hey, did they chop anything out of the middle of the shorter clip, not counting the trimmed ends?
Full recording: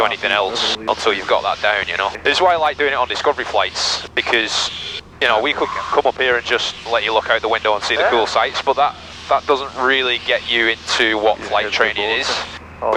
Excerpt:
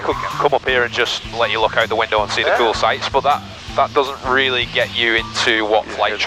no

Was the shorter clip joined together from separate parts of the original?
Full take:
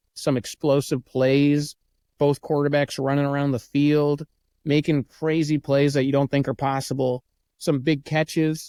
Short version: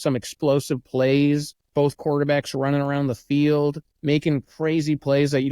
yes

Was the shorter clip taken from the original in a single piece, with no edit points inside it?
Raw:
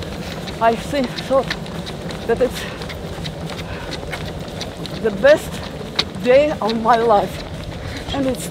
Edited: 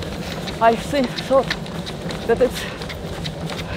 yes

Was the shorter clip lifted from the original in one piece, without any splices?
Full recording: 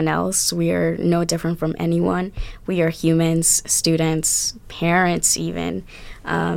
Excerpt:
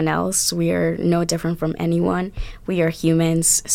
yes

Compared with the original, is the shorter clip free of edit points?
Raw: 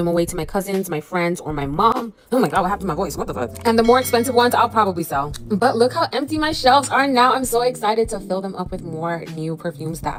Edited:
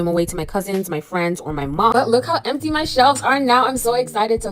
no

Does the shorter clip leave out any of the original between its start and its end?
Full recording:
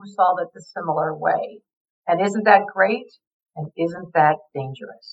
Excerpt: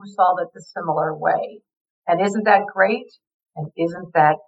no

